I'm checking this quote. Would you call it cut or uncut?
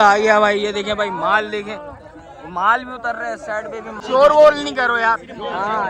cut